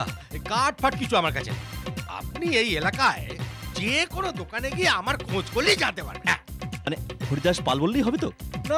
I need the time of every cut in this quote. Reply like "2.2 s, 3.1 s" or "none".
none